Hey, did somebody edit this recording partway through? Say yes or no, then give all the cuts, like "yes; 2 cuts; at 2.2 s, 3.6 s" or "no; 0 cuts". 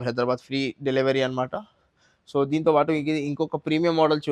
no; 0 cuts